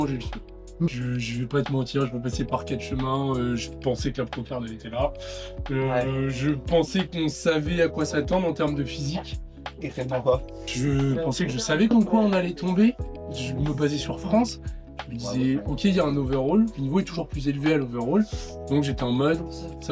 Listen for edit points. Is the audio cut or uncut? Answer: uncut